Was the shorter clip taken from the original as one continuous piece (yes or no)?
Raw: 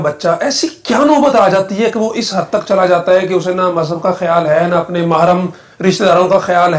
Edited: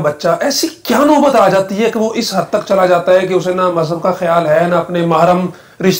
yes